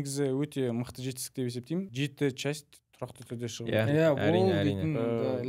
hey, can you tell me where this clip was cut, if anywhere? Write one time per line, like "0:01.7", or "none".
0:01.9